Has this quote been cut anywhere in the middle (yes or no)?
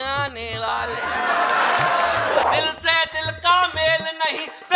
yes